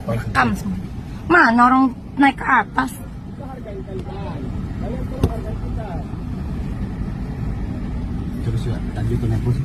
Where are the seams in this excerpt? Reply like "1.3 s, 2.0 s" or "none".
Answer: none

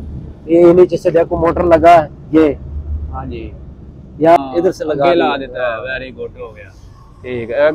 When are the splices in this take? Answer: 4.4 s

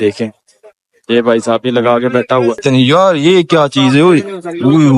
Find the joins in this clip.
2.6 s

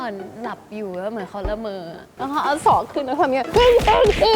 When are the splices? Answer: 2.0 s

